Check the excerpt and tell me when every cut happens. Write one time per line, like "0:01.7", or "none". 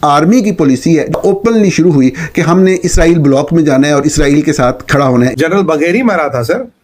0:01.1
0:05.3